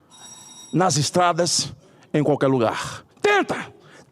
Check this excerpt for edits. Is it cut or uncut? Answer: cut